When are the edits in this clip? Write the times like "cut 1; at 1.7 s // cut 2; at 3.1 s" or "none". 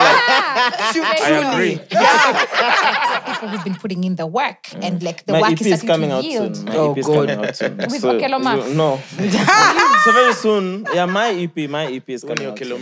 cut 1; at 3.3 s